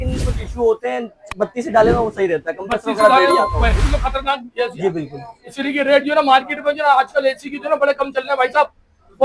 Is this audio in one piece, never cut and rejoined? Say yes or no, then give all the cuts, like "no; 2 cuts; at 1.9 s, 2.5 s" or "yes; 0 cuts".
yes; 0 cuts